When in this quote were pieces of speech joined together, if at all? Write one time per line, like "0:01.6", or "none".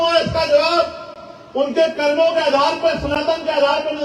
none